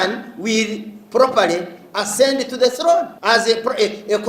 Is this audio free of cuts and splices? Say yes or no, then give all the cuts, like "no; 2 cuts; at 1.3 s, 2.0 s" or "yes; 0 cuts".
no; 1 cut; at 3.1 s